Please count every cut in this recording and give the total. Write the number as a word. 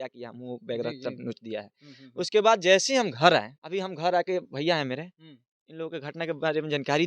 one